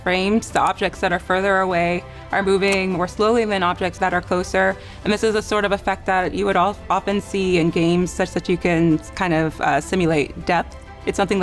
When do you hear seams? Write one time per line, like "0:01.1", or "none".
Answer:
0:03.9